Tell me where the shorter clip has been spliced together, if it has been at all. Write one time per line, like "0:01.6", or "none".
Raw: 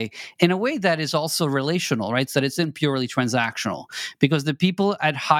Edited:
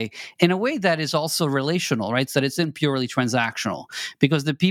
none